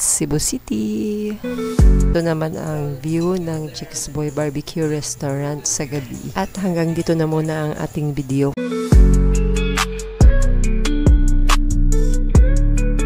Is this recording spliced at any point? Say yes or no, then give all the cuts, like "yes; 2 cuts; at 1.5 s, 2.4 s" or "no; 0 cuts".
yes; 2 cuts; at 2.1 s, 8.6 s